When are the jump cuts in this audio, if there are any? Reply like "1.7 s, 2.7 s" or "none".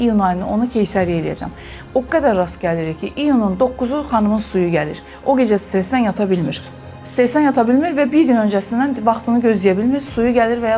none